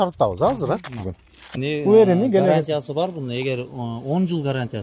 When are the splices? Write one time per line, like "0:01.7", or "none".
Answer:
0:01.6